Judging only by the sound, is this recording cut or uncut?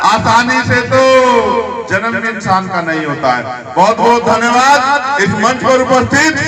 uncut